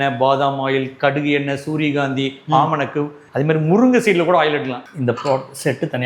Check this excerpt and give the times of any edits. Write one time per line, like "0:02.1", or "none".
0:03.2
0:04.8